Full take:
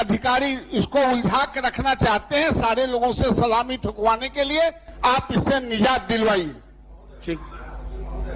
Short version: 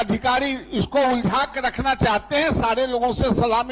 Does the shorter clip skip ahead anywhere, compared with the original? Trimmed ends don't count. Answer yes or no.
no